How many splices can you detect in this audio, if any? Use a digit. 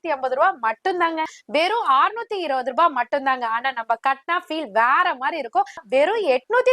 2